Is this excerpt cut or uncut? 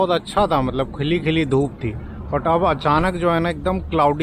uncut